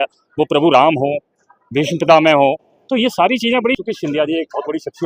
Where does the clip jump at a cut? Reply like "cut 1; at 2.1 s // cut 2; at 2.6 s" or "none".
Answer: cut 1; at 3.8 s